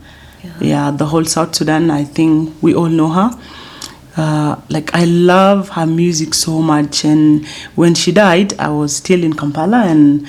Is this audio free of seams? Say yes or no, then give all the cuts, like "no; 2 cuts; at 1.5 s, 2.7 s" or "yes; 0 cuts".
yes; 0 cuts